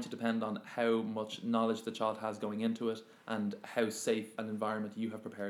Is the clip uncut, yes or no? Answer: no